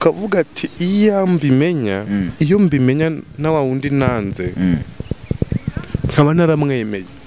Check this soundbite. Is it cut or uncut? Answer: uncut